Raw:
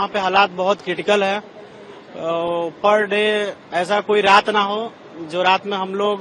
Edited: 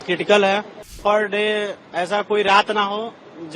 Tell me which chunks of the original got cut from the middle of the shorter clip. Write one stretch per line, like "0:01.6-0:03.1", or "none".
0:01.7-0:02.7